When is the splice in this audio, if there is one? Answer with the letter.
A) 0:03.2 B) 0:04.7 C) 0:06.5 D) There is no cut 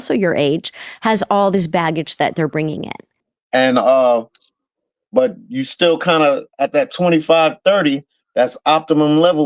A